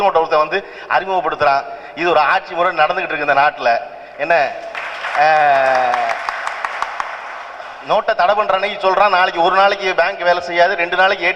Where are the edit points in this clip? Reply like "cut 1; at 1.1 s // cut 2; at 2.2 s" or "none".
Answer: none

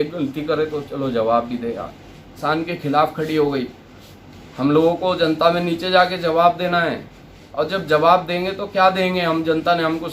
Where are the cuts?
cut 1; at 2.3 s

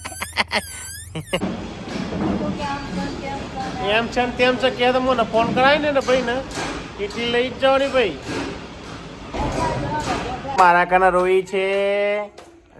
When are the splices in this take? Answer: cut 1; at 1.4 s // cut 2; at 10.5 s

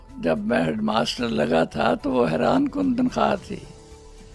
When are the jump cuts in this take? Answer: none

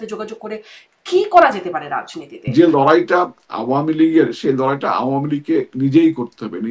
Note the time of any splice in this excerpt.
cut 1; at 2.4 s

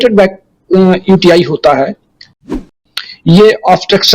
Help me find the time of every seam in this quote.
cut 1; at 2.6 s

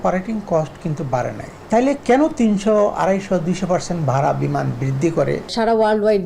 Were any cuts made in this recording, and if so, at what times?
cut 1; at 1.5 s // cut 2; at 5.5 s

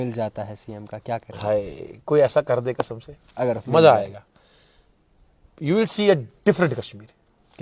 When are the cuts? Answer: none

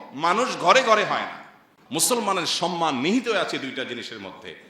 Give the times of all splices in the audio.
cut 1; at 1.7 s

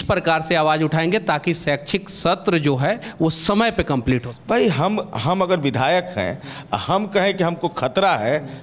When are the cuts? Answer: cut 1; at 4.3 s

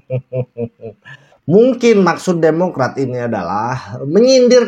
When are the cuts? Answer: cut 1; at 1.4 s

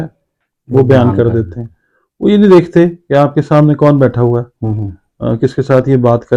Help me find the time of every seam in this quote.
none

